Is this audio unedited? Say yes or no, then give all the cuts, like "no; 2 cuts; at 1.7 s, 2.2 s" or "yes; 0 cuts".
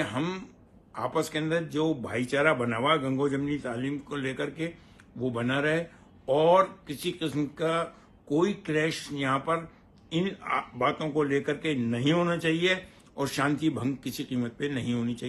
yes; 0 cuts